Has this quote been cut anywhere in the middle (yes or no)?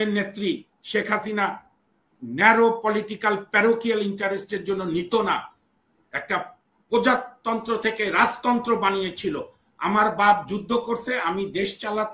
no